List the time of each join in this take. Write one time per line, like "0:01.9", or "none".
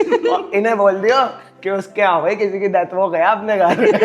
none